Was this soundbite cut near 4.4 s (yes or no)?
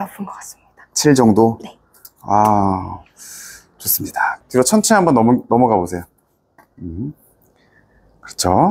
yes